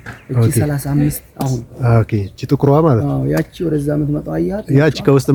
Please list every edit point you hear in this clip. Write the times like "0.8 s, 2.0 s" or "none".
none